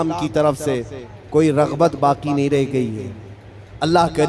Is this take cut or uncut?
uncut